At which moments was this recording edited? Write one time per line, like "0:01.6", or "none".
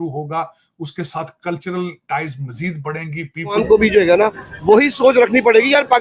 0:03.6